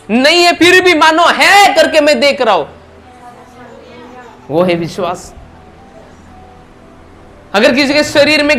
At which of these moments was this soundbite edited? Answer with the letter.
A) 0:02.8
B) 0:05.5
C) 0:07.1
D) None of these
D